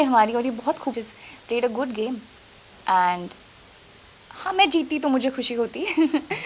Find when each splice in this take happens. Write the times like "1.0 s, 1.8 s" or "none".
1.0 s